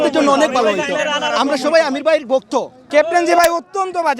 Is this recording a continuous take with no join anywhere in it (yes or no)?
no